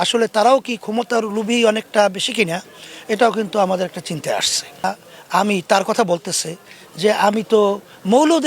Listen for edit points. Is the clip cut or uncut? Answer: cut